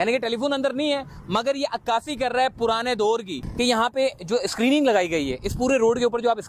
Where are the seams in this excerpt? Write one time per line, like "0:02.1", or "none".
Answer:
0:03.4